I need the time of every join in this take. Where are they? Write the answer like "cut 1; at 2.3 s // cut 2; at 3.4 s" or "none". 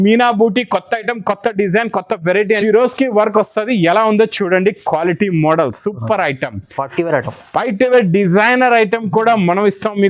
cut 1; at 2.6 s

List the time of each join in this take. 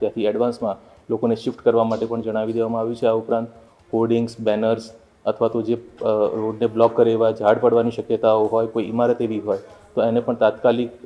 none

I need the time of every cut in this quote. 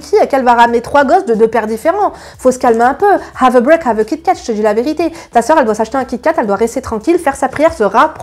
none

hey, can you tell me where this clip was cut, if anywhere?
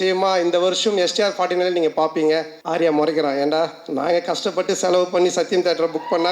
cut 1; at 2.6 s

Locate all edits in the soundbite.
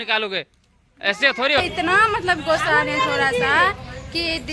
cut 1; at 1.6 s

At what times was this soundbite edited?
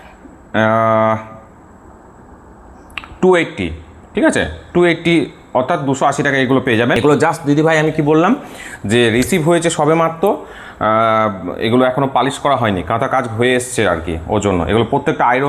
cut 1; at 7.0 s

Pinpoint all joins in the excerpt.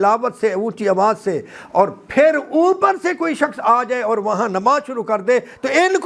none

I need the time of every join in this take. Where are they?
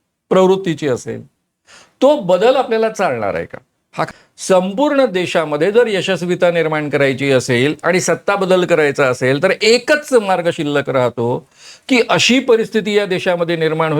cut 1; at 4.1 s

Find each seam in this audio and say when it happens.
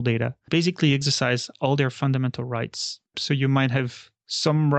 cut 1; at 3.2 s

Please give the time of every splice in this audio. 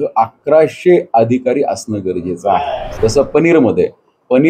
cut 1; at 2.8 s

